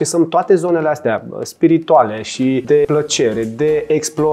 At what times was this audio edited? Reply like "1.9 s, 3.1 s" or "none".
2.8 s

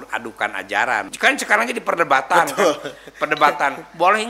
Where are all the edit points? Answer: 1.1 s

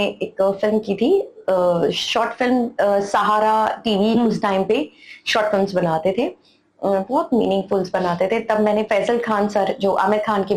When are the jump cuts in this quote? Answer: none

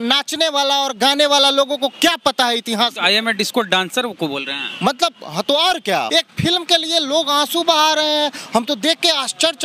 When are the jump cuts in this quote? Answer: 6.1 s

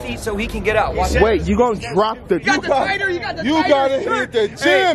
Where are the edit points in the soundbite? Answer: 2.4 s

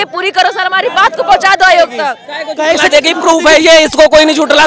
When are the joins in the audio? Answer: 2.3 s

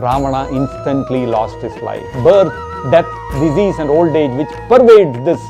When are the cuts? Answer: 2.1 s

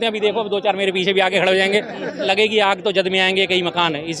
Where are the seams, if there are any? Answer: 2.2 s

